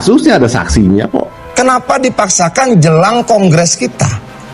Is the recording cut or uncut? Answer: cut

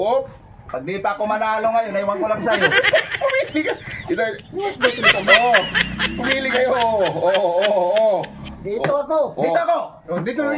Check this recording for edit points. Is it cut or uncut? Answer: uncut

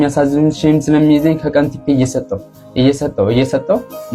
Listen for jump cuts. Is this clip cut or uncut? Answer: uncut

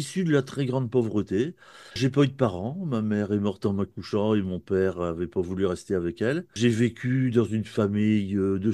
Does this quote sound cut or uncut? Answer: cut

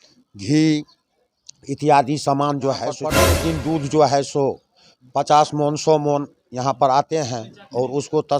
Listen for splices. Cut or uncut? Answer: cut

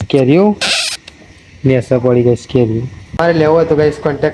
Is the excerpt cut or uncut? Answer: cut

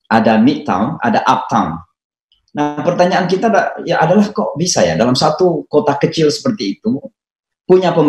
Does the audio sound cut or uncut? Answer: cut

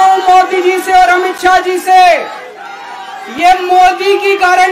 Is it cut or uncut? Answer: uncut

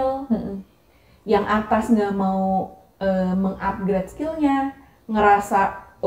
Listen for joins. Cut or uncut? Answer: uncut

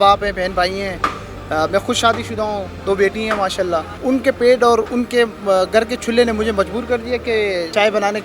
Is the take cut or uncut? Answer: uncut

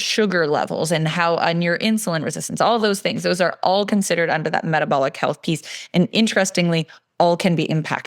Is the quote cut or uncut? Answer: uncut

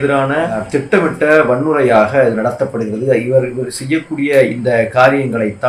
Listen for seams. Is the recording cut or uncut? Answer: uncut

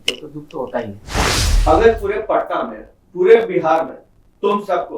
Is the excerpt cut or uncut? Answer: cut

